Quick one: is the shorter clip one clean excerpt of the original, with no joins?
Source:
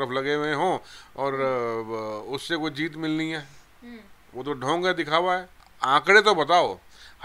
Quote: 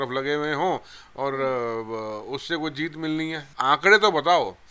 no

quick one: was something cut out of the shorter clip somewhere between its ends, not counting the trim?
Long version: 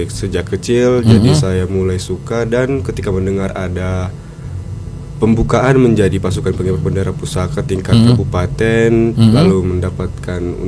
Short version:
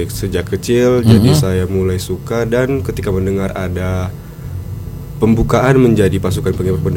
no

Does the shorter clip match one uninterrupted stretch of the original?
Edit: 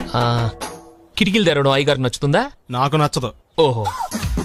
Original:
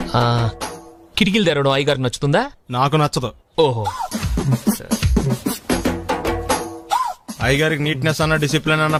yes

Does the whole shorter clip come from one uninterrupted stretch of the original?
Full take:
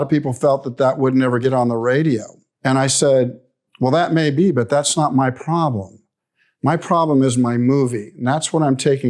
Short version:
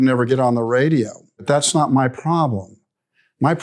no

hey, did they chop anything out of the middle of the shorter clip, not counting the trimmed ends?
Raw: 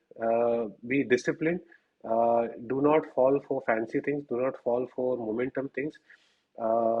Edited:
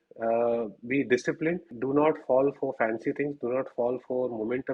yes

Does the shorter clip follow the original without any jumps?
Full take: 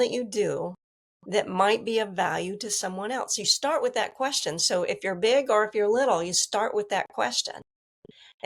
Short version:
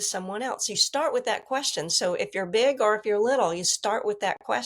yes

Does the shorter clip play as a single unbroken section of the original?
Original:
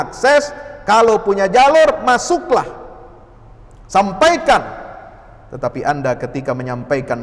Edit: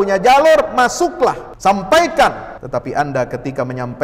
no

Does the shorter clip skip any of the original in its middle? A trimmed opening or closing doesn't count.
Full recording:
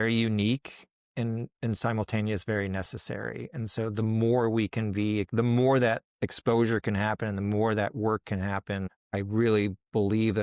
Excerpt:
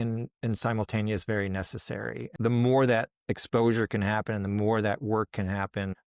yes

